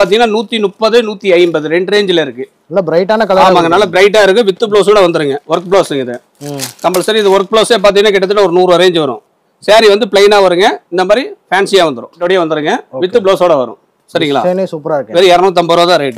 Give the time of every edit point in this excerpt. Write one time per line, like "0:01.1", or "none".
0:05.4
0:12.2